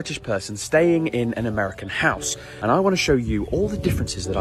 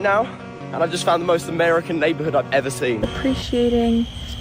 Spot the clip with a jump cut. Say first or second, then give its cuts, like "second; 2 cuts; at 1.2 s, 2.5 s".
second; 1 cut; at 3.1 s